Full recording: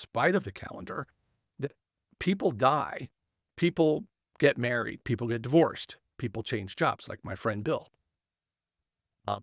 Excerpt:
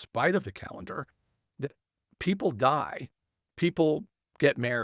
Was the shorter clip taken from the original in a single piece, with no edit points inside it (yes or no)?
yes